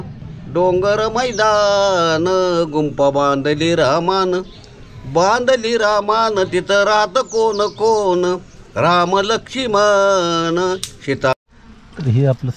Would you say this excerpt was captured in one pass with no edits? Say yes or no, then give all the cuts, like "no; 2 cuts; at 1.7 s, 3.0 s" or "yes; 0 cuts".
no; 1 cut; at 11.3 s